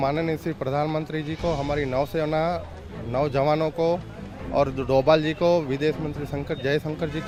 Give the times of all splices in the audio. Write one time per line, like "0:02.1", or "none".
none